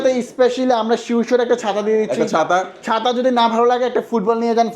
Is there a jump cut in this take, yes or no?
no